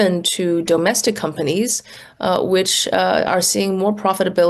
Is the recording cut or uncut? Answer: uncut